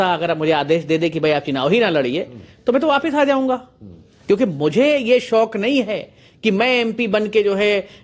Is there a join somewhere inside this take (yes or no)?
no